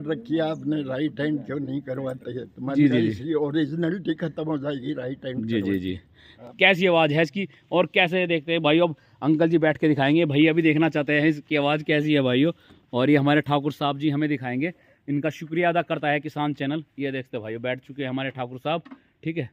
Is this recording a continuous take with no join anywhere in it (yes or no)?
no